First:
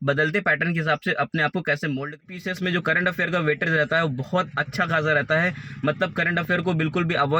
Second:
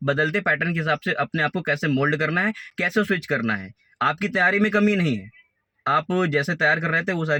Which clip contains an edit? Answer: first; 1 cut; at 2.2 s

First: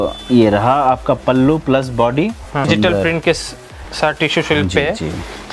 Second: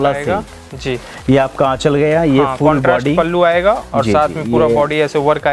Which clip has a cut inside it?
first; 1 cut; at 2.7 s

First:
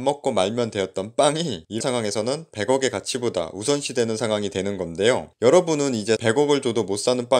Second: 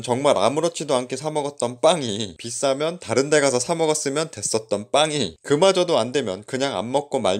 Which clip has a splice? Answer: first; 2 cuts; at 1.8 s, 6.2 s

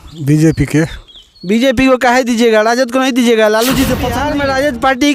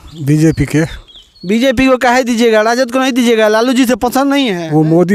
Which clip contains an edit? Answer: first; 1 cut; at 4.2 s

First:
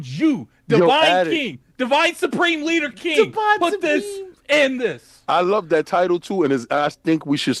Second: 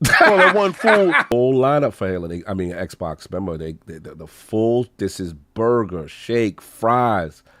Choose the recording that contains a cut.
second; 1 cut; at 1.3 s

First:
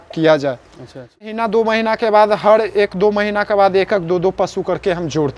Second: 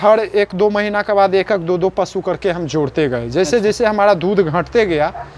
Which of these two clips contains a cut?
first; 1 cut; at 1.3 s

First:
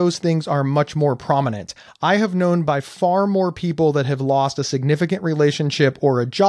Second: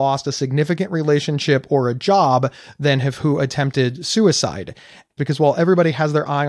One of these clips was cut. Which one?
second; 1 cut; at 5.1 s

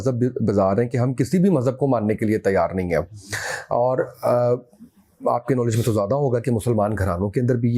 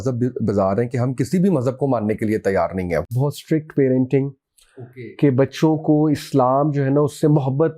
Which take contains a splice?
second; 1 cut; at 3.2 s

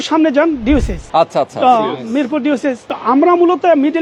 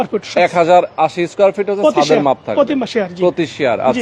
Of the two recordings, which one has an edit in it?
first; 2 cuts; at 1.0 s, 2.9 s

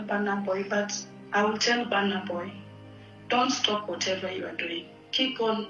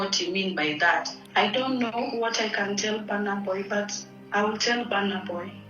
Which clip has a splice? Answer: second; 1 cut; at 1.2 s

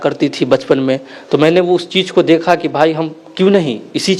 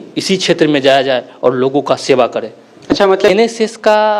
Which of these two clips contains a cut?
second; 1 cut; at 3.3 s

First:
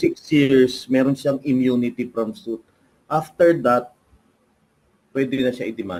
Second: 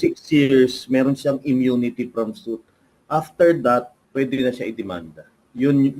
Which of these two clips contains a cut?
second; 1 cut; at 4.0 s

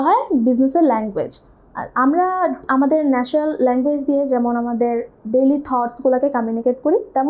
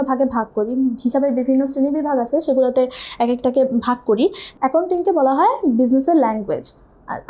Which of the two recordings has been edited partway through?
second; 1 cut; at 4.4 s

